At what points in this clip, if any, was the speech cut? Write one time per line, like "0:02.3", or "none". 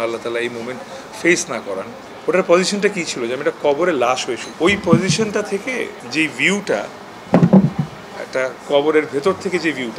0:02.0
0:04.5
0:06.0
0:08.6